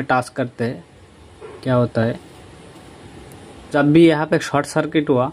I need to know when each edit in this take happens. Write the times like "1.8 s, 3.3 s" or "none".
3.7 s